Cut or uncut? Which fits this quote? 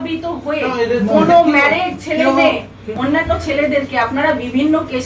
cut